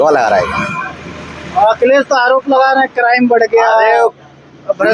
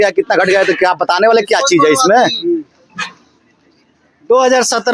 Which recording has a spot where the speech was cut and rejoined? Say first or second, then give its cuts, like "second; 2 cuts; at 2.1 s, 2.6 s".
second; 1 cut; at 2.1 s